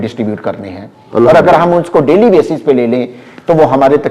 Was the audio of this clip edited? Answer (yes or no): no